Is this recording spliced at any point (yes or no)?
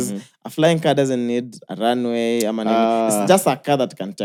no